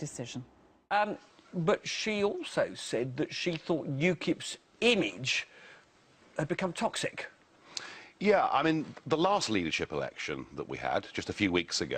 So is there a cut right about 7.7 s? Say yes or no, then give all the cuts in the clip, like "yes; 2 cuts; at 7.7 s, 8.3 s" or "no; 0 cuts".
no; 0 cuts